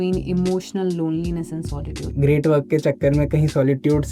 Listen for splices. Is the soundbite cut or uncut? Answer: cut